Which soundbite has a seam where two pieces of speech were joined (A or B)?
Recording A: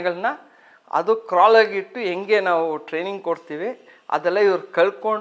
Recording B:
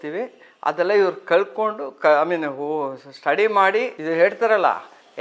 B